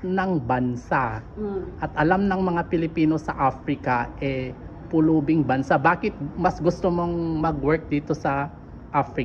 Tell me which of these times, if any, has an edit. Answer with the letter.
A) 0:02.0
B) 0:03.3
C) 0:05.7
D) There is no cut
D